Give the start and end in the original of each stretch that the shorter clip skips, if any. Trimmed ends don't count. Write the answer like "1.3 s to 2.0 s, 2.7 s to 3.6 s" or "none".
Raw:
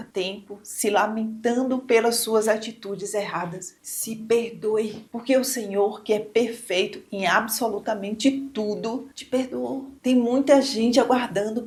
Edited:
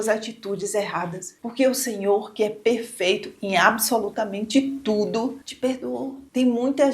3.8 s to 5.1 s